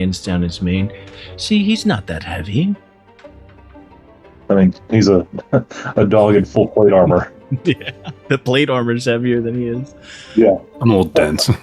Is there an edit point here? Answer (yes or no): no